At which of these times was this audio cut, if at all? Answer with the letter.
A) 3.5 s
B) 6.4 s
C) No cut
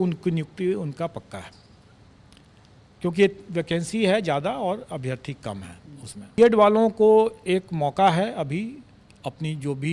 B